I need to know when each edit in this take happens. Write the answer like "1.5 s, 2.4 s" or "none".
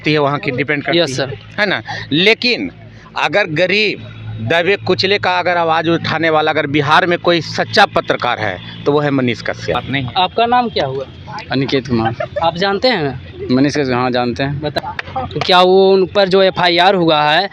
9.8 s, 14.7 s